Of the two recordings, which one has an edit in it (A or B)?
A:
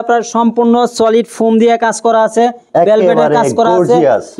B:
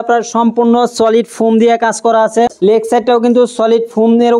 B